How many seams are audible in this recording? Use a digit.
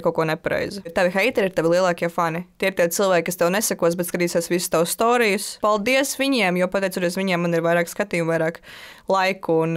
2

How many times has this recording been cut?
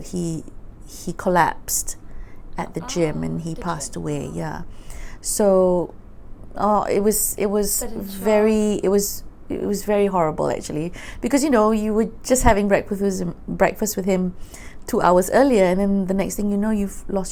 0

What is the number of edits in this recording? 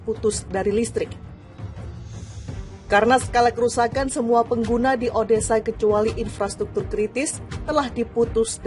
2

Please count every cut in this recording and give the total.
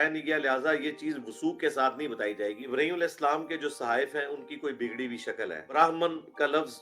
2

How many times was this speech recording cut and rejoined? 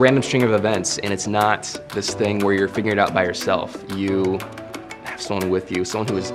0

